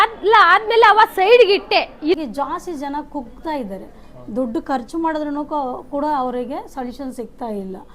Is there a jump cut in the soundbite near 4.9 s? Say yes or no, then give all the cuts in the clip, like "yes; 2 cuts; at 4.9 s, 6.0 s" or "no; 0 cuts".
no; 1 cut; at 2.2 s